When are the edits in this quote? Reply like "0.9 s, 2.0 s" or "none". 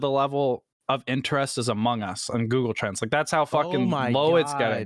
none